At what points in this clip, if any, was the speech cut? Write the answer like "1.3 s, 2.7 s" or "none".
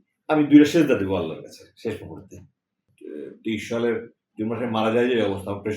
2.9 s